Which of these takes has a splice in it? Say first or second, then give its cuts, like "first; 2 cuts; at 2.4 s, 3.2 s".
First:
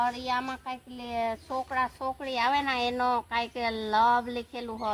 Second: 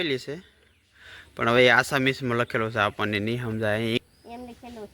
second; 1 cut; at 4.0 s